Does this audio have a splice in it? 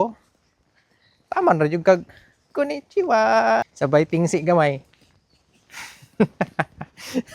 yes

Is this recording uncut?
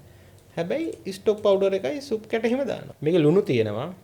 no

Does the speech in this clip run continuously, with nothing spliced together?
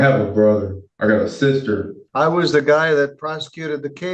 no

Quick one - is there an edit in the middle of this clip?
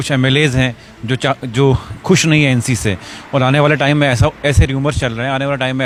no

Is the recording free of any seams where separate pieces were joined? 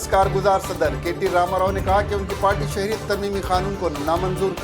yes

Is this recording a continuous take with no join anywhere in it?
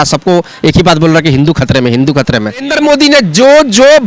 no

